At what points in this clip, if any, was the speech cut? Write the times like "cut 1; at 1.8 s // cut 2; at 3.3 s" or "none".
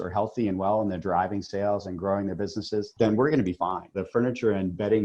cut 1; at 2.9 s // cut 2; at 4.0 s